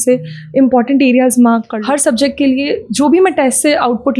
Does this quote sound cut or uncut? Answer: cut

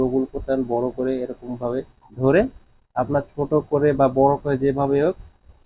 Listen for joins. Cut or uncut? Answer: cut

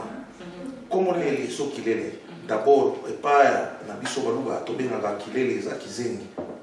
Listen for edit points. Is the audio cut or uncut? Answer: cut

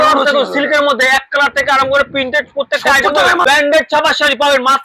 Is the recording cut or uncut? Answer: cut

